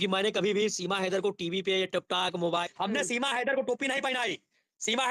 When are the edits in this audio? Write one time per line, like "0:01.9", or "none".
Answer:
0:02.6